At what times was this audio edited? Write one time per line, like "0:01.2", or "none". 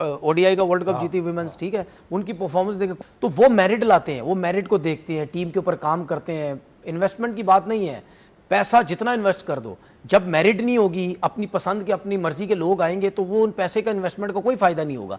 0:02.9